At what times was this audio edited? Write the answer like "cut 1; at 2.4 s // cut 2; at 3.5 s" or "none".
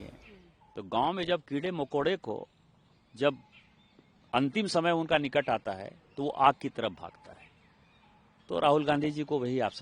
none